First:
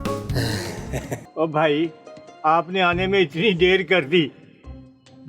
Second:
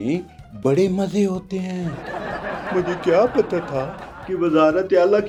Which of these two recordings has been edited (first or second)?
first